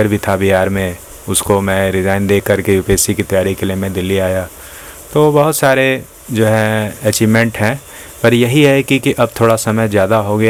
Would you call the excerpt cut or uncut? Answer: uncut